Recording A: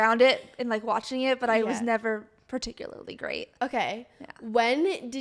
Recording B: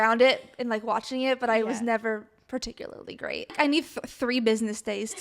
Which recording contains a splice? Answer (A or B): B